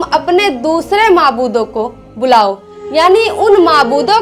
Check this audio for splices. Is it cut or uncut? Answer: uncut